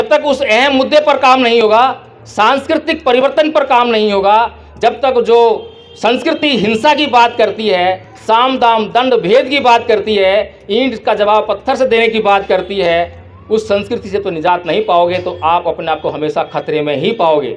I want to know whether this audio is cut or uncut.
uncut